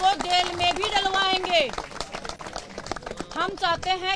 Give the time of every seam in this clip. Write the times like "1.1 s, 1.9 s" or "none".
none